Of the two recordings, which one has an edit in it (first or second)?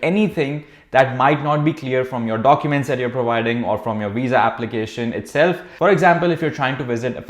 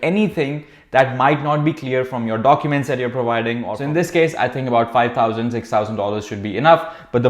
second